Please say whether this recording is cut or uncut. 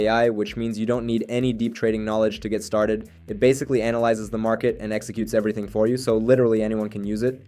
uncut